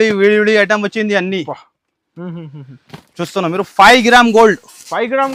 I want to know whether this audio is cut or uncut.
uncut